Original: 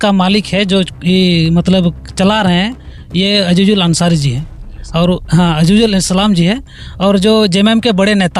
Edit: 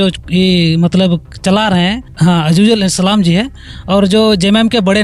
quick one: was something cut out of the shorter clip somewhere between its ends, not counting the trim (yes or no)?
yes